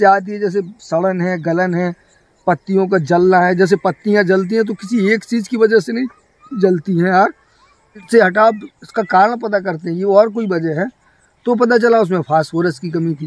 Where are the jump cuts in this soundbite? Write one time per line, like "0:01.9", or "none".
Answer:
0:08.0

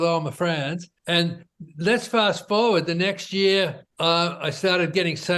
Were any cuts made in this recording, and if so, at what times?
0:00.9
0:03.8

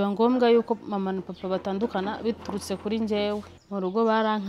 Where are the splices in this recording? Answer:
0:03.5

